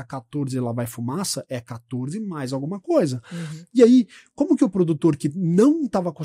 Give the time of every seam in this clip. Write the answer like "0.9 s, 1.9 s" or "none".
none